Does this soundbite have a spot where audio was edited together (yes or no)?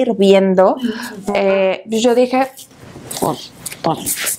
yes